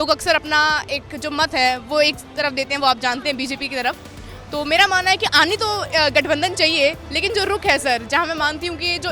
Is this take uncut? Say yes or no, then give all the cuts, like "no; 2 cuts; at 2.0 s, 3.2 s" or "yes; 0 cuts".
yes; 0 cuts